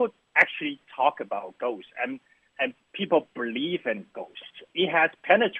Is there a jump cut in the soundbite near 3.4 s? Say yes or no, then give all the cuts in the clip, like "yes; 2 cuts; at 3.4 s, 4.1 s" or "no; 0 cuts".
no; 1 cut; at 4.7 s